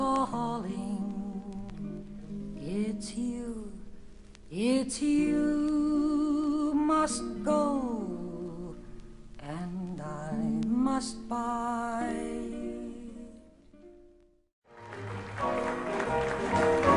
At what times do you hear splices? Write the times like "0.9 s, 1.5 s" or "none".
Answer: 3.1 s